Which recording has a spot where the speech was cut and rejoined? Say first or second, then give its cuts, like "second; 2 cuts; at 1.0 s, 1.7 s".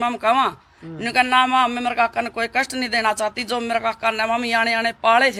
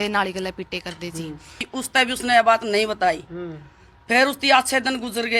second; 1 cut; at 1.6 s